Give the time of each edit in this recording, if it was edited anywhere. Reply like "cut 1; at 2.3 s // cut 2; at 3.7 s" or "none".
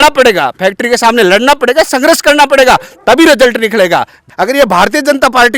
cut 1; at 4.2 s